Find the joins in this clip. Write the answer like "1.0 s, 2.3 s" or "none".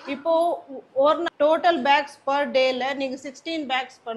1.3 s